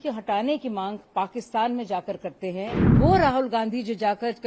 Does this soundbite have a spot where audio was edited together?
yes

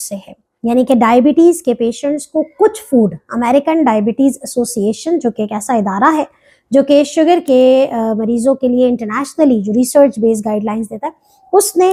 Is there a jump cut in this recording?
no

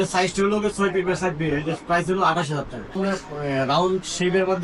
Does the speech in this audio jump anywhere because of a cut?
yes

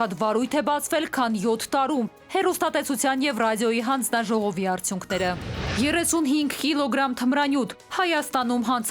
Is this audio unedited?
no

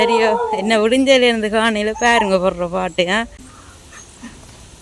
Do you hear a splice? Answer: yes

